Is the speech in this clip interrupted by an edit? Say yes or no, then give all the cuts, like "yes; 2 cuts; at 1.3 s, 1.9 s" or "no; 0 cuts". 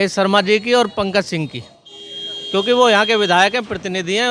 no; 0 cuts